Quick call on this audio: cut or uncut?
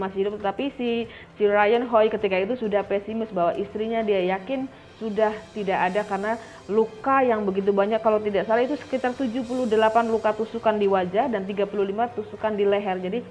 uncut